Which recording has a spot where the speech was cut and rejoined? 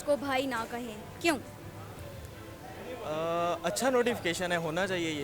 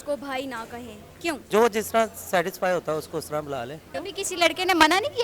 second; 2 cuts; at 1.4 s, 3.9 s

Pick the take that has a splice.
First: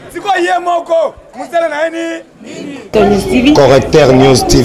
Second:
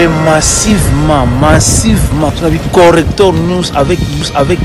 first; 1 cut; at 2.8 s

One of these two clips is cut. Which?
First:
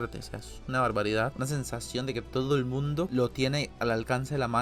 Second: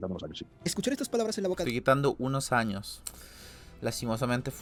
first; 1 cut; at 1.3 s

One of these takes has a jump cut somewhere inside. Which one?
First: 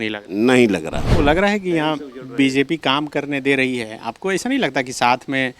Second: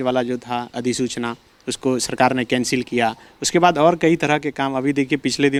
first; 1 cut; at 1.0 s

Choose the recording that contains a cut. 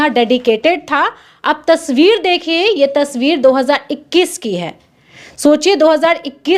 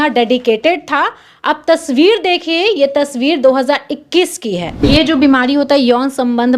second; 1 cut; at 4.8 s

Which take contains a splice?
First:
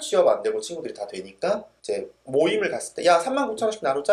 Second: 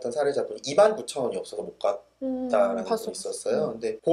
first; 1 cut; at 1.7 s

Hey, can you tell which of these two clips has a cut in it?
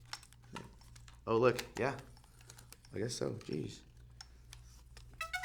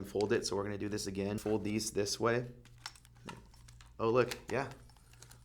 second; 1 cut; at 1.4 s

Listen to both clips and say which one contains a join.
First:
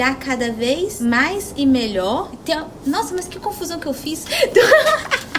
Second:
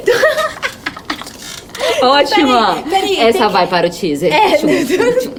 first; 2 cuts; at 1.0 s, 2.3 s

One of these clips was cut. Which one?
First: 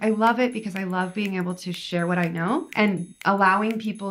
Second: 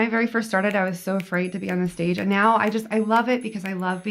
first; 1 cut; at 2.7 s

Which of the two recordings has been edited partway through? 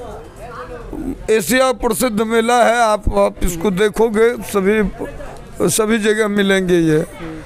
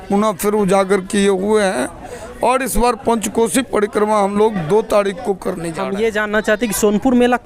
second; 1 cut; at 5.7 s

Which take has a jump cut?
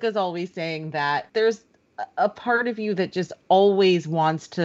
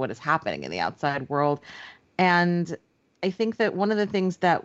first; 1 cut; at 1.3 s

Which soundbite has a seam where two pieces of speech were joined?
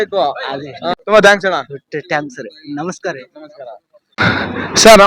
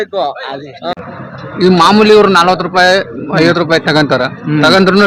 second; 1 cut; at 1.0 s

